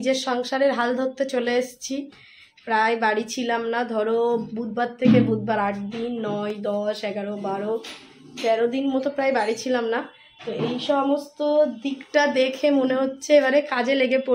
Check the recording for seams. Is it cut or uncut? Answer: uncut